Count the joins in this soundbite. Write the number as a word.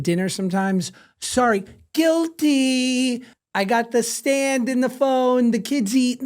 one